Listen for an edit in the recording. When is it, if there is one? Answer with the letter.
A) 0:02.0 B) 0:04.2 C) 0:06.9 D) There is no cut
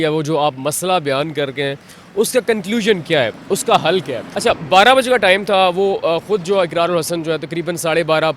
B